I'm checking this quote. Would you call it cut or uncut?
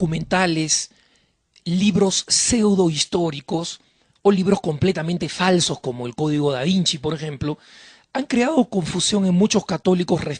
cut